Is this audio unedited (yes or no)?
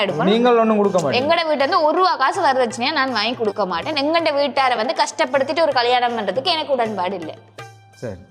yes